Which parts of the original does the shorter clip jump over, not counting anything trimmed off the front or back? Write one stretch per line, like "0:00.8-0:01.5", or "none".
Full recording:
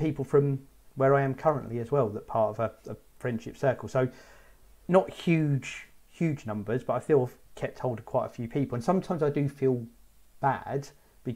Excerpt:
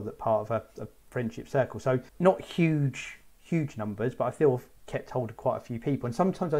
0:04.2-0:04.8

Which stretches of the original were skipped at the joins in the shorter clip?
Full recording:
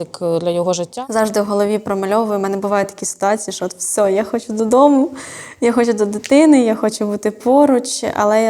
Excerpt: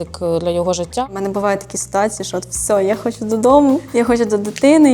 0:01.1-0:02.4
0:05.1-0:05.5

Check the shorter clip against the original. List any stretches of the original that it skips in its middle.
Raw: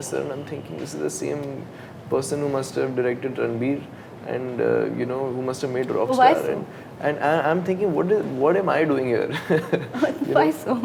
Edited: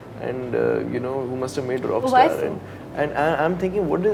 none

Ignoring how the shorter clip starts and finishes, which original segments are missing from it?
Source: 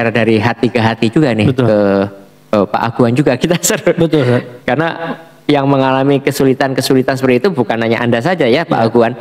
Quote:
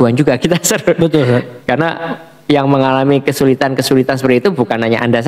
none

